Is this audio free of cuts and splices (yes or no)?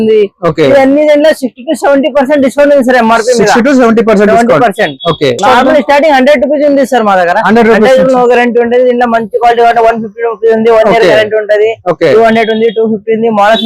yes